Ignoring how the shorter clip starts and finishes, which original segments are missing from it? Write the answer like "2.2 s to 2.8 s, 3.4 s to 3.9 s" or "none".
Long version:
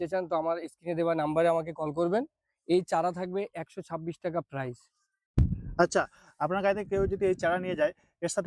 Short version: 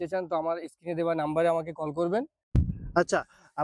2.4 s to 5.2 s